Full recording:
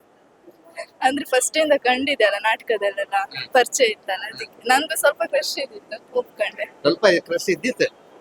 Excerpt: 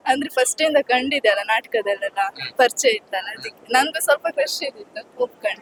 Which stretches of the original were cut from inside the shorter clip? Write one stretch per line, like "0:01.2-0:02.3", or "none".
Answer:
none